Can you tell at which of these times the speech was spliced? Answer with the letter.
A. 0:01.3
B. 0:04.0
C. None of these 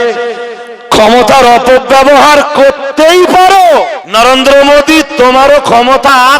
B